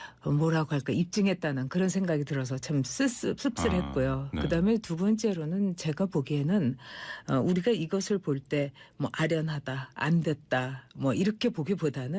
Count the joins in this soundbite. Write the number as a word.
one